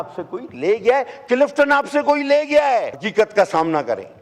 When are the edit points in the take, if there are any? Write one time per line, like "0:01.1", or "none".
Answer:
0:03.0